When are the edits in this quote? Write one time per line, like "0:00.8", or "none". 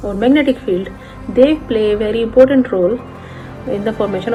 none